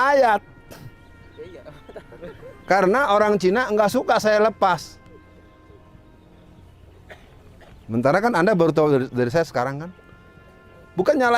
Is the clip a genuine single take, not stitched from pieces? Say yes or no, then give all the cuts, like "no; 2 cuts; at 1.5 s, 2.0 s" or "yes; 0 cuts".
yes; 0 cuts